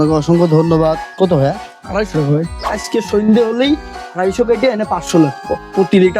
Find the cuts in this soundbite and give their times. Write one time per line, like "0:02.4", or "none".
0:02.8